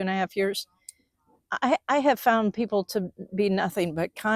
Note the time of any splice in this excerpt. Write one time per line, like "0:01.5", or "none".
none

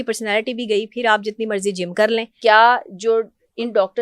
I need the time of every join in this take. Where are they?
0:02.3

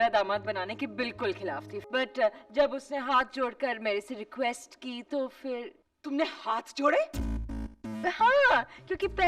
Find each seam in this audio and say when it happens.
0:01.7

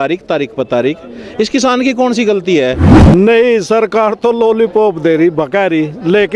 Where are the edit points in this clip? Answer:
0:02.9

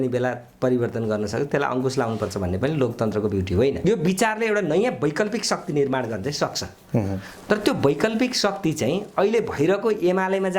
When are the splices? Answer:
0:03.8

